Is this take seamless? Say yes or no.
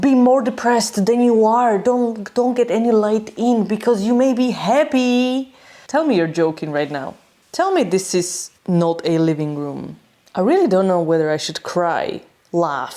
yes